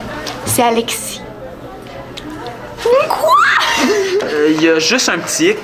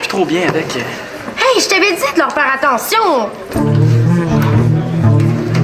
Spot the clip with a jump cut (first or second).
first